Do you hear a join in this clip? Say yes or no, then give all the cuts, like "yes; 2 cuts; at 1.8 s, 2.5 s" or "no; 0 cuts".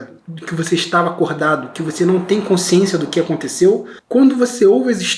yes; 1 cut; at 3.9 s